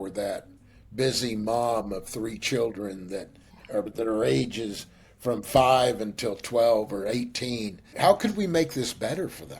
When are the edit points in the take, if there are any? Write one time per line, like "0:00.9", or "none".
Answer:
0:03.8
0:07.9